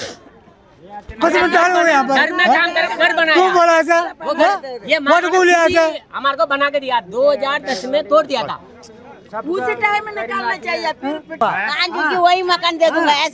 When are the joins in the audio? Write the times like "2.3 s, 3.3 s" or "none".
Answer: 11.4 s

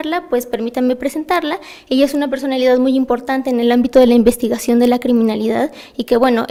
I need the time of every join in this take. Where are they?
none

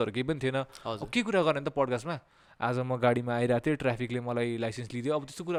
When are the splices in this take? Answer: none

